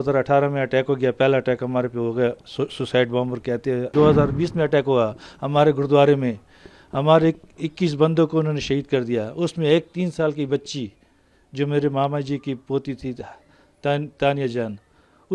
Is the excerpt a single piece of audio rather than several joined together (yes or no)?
no